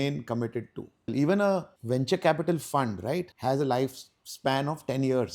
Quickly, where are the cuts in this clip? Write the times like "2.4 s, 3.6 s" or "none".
1.1 s, 1.7 s, 3.3 s